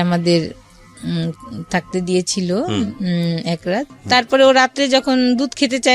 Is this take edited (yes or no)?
yes